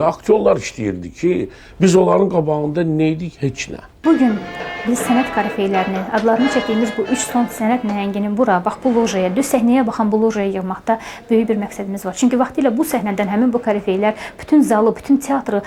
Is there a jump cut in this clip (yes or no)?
yes